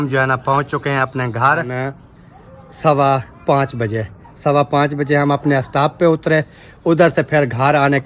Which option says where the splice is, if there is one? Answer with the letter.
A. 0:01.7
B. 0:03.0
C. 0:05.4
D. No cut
A